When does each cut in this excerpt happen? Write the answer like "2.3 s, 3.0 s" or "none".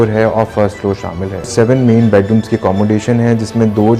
1.5 s